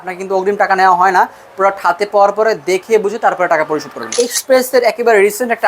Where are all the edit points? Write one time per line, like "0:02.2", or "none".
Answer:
0:04.1